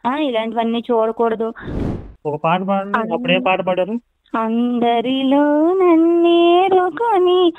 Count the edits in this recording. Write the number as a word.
two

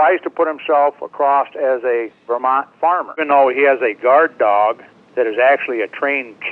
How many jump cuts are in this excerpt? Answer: one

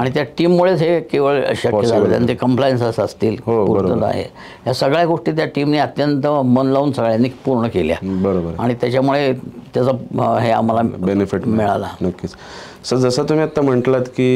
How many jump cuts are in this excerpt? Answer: zero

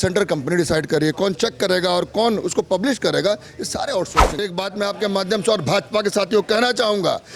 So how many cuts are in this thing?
one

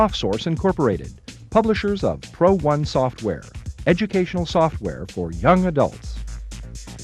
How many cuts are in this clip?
one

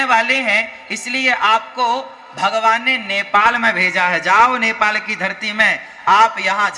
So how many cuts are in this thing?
zero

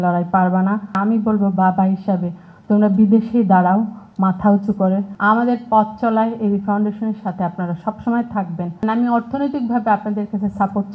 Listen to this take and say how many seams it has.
three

